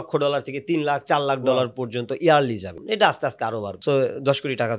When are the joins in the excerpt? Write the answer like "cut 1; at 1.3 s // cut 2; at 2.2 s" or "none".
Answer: cut 1; at 2.7 s // cut 2; at 3.7 s